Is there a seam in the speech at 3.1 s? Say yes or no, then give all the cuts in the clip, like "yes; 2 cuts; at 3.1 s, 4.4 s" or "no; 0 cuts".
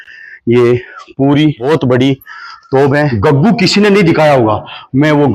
yes; 1 cut; at 3.1 s